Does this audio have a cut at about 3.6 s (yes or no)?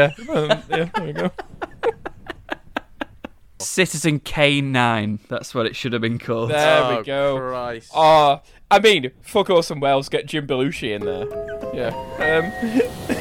yes